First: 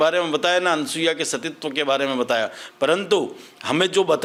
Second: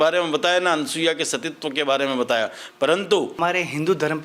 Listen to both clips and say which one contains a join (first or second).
second